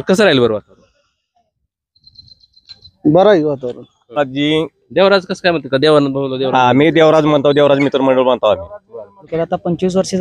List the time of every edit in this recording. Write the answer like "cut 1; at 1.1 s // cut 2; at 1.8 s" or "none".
cut 1; at 4.2 s // cut 2; at 9.3 s